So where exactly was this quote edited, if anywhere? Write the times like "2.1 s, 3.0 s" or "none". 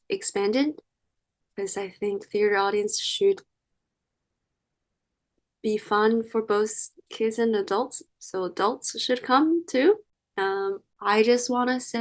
10.4 s